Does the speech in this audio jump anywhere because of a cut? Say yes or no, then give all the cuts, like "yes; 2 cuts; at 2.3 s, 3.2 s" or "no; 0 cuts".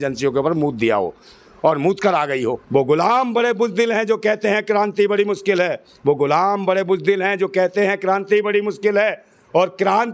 yes; 1 cut; at 2.7 s